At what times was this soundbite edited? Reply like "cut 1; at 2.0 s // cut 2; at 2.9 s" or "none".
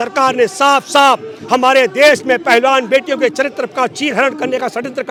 none